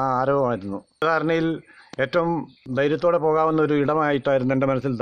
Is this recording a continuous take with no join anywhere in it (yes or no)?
no